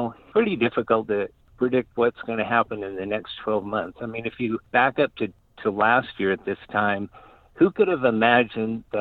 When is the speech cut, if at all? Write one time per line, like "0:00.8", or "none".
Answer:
none